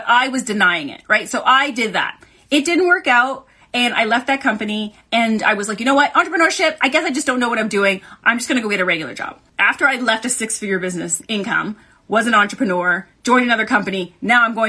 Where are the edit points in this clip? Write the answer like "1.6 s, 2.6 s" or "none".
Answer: 8.2 s, 9.5 s